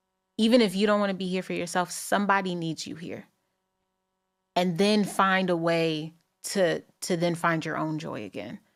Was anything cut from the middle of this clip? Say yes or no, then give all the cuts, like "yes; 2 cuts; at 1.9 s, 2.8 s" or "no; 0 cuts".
no; 0 cuts